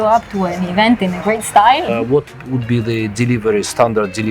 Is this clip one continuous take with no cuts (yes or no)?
no